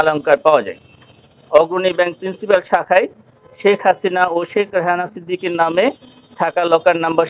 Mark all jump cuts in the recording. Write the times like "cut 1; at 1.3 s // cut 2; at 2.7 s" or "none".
none